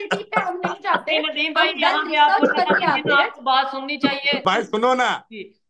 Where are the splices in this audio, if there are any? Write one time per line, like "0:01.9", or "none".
0:04.4